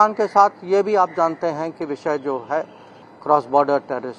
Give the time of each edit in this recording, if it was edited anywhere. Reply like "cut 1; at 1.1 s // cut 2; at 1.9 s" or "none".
cut 1; at 3.0 s